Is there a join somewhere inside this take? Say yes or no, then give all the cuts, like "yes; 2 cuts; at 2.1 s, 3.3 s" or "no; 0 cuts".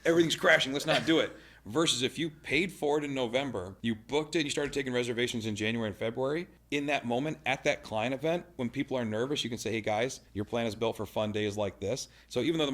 yes; 3 cuts; at 3.7 s, 6.6 s, 10.2 s